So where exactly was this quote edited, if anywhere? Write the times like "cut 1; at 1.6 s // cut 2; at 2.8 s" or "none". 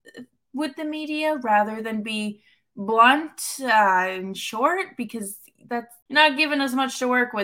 cut 1; at 6.0 s

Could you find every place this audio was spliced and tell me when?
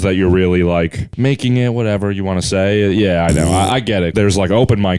cut 1; at 1.0 s // cut 2; at 4.1 s

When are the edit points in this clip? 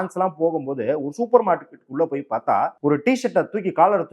cut 1; at 2.7 s

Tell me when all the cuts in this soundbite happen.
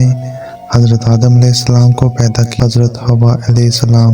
cut 1; at 2.5 s

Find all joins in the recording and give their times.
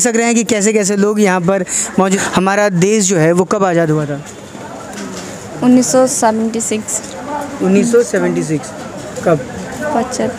cut 1; at 2.2 s

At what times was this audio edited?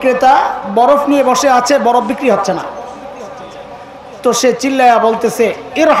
cut 1; at 3.8 s

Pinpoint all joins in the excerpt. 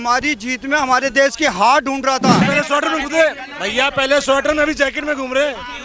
cut 1; at 2.4 s

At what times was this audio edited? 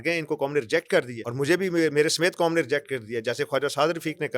cut 1; at 1.2 s

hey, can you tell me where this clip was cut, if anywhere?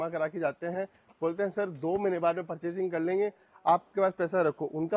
none

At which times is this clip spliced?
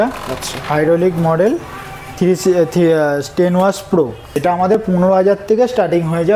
cut 1; at 4.4 s

